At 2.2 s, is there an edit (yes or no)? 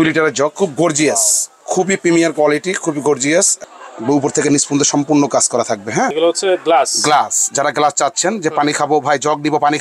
no